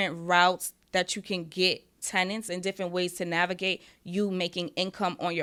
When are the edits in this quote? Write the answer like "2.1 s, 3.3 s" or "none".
none